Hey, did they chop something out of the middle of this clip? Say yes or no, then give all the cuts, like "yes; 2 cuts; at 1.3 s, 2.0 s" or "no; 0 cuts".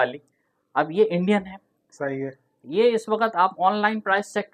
no; 0 cuts